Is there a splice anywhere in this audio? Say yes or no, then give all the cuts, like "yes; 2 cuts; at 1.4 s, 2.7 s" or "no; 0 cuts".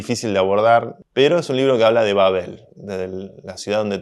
yes; 1 cut; at 1.0 s